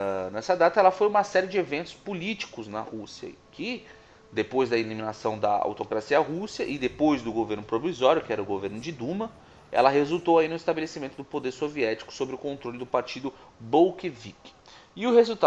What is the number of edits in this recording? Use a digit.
1